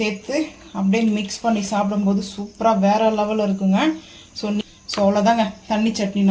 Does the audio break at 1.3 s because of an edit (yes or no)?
no